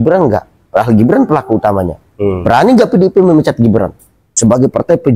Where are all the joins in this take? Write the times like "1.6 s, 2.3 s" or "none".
4.2 s